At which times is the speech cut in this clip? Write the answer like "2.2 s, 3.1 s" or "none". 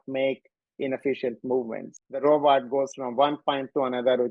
2.2 s